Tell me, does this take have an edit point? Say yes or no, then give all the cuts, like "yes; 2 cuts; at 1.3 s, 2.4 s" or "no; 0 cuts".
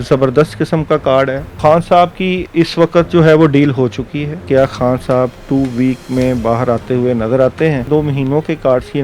yes; 3 cuts; at 1.5 s, 4.4 s, 7.8 s